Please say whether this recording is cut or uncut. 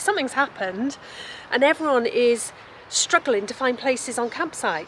uncut